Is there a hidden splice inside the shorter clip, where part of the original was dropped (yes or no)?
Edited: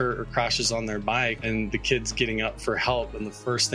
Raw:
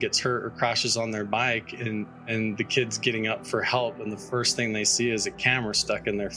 yes